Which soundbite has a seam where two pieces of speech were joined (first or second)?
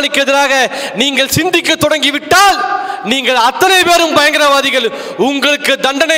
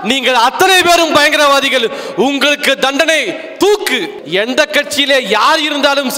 second